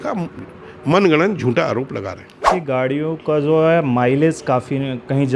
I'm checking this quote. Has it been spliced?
yes; 1 cut; at 2.5 s

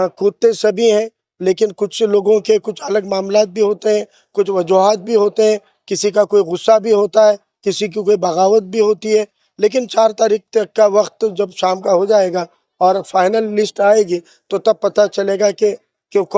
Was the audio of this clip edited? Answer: no; 0 cuts

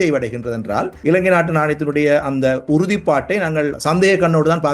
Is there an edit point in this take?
yes; 2 cuts; at 0.9 s, 3.7 s

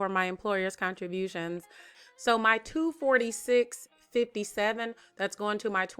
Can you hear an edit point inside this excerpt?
yes; 1 cut; at 1.9 s

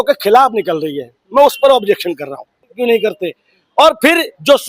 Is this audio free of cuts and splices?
no; 1 cut; at 2.7 s

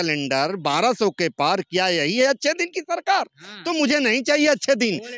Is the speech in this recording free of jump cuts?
yes; 0 cuts

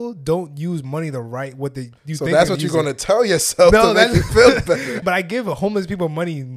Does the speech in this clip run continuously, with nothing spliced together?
no; 1 cut; at 5.0 s

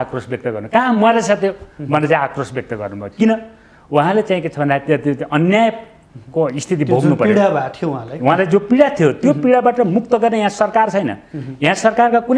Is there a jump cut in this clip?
no; 0 cuts

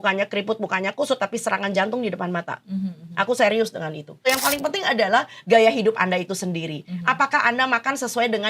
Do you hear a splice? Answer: yes; 1 cut; at 4.2 s

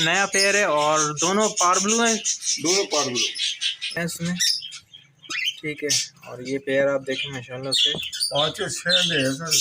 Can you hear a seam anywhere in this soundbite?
yes; 1 cut; at 3.9 s

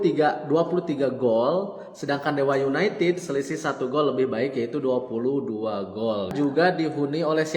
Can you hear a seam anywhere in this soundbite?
yes; 1 cut; at 6.3 s

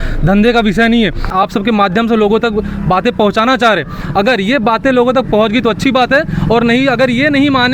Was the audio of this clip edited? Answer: yes; 1 cut; at 1.3 s

